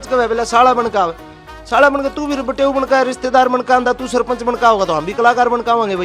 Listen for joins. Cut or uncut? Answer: uncut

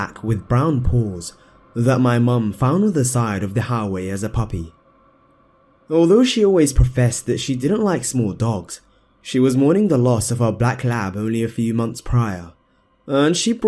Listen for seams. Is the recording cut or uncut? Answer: uncut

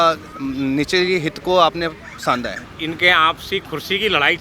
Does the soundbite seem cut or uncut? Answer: cut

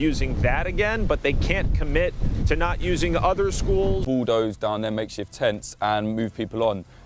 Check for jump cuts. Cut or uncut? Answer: uncut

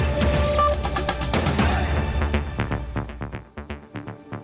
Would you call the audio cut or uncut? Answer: cut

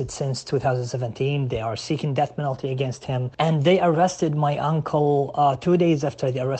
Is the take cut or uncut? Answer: cut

